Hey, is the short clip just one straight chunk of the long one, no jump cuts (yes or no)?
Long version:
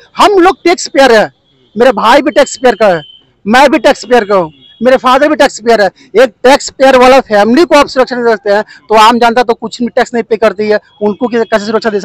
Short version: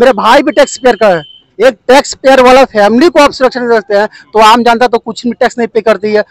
no